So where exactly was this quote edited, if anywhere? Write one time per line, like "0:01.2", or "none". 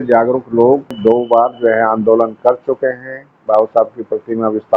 0:00.9

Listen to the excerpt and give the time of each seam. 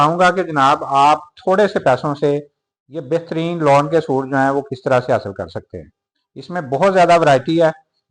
none

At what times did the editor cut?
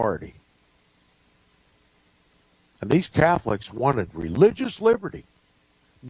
0:03.7

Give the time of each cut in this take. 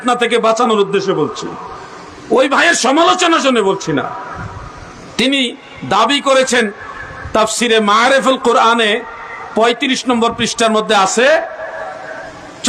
none

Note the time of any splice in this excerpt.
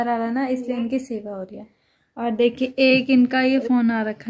none

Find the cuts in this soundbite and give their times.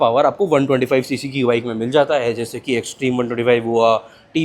none

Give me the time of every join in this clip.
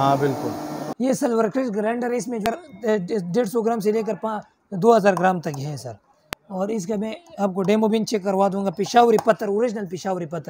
0:00.9
0:02.4

